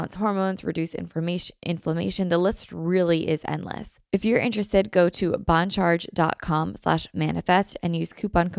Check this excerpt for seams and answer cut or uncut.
cut